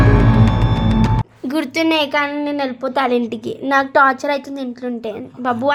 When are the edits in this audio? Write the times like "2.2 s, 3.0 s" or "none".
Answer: none